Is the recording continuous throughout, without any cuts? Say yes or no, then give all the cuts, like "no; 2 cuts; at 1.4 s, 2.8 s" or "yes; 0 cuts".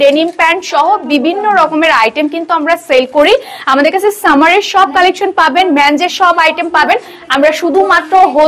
yes; 0 cuts